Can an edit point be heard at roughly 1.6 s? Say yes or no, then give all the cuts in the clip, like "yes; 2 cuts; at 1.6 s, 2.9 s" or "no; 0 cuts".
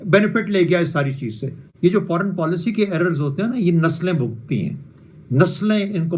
yes; 1 cut; at 1.6 s